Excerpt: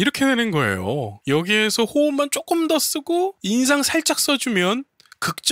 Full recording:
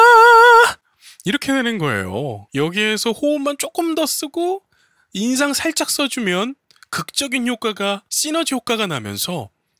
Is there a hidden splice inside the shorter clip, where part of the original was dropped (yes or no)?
yes